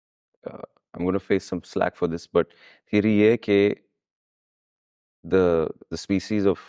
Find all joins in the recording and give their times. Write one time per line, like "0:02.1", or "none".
none